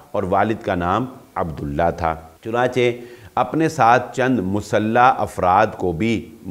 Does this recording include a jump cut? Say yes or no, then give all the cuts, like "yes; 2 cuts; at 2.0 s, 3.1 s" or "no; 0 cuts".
yes; 1 cut; at 2.3 s